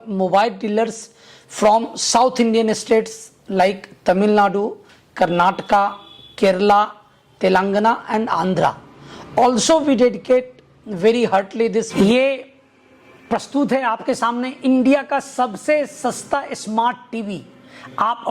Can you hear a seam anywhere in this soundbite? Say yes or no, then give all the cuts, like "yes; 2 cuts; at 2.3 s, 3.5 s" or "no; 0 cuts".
yes; 1 cut; at 11.9 s